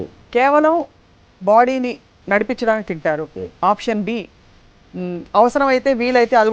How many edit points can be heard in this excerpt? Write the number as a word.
zero